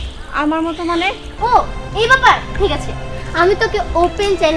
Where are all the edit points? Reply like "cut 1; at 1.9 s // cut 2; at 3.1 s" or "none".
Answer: cut 1; at 1.3 s